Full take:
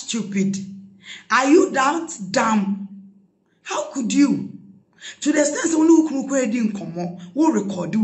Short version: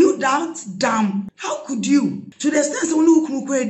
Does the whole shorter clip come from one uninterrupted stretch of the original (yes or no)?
no